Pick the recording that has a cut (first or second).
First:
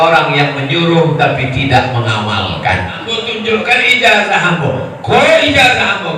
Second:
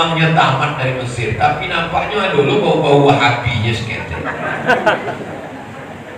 first